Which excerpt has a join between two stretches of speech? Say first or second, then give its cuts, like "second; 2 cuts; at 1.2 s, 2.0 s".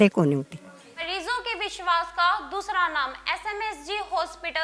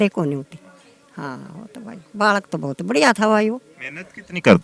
first; 1 cut; at 0.9 s